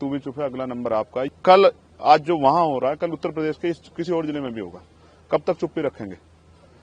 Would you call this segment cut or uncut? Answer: cut